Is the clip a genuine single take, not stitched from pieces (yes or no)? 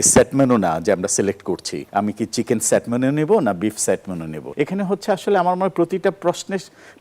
no